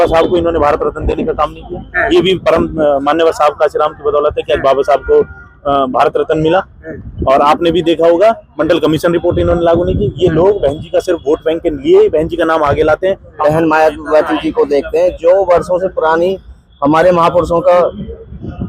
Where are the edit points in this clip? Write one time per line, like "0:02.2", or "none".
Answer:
0:13.3

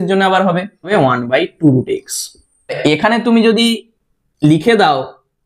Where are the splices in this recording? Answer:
0:00.9
0:02.8

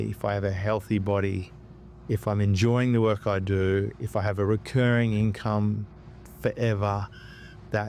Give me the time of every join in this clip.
none

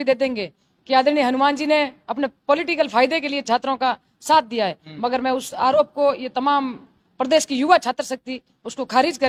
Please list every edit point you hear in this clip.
none

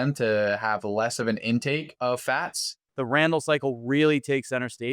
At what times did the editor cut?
0:01.9
0:02.8

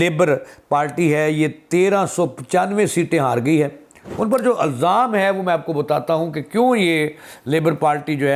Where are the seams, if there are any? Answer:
0:04.0

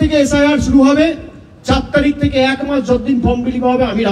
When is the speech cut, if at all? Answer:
none

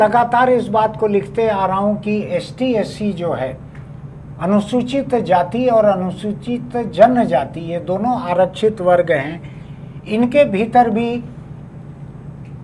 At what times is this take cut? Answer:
none

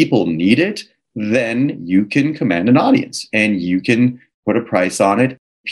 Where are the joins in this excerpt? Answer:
0:04.3

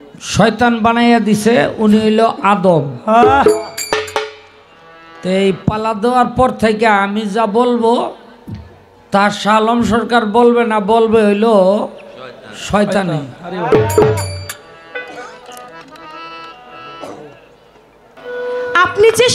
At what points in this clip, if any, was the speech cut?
0:18.0

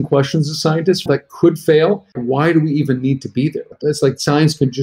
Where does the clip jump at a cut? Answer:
0:01.1
0:02.2
0:03.8

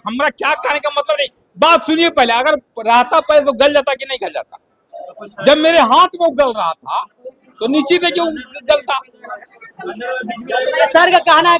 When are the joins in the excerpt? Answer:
none

